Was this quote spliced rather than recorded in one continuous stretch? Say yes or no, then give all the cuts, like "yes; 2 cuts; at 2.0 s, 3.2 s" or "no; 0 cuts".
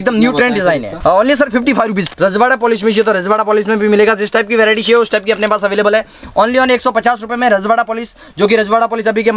yes; 2 cuts; at 0.9 s, 2.1 s